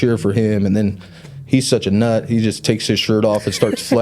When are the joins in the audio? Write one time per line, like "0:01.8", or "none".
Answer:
none